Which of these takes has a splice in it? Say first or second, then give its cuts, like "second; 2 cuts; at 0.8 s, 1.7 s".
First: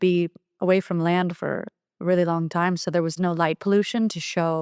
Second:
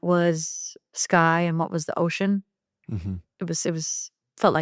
first; 1 cut; at 3.1 s